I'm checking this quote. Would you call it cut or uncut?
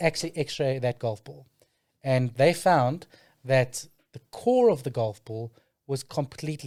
uncut